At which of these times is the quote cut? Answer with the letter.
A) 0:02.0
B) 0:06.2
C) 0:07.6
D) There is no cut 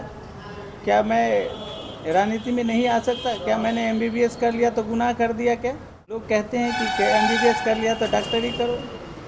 B